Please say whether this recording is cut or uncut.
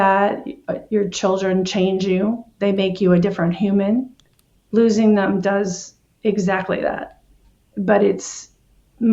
uncut